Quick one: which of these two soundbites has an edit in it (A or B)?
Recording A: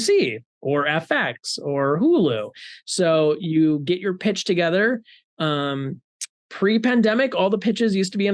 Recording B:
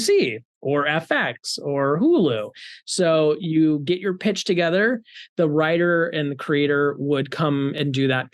B